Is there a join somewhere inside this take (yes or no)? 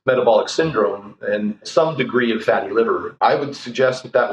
yes